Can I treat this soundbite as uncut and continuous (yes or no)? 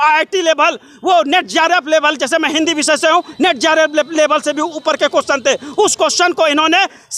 yes